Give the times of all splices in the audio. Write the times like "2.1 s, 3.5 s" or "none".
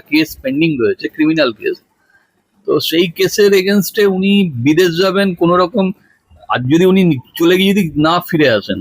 none